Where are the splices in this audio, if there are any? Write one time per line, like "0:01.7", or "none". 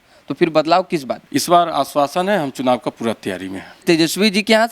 0:01.2
0:03.8